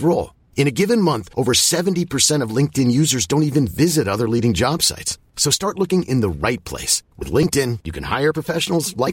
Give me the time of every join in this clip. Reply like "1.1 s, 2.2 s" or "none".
none